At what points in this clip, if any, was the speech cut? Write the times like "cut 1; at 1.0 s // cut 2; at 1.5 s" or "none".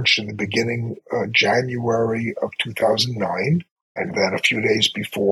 cut 1; at 1.0 s // cut 2; at 3.8 s